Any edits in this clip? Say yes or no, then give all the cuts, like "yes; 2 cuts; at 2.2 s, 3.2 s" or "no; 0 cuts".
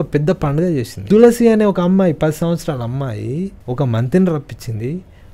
yes; 2 cuts; at 0.9 s, 3.6 s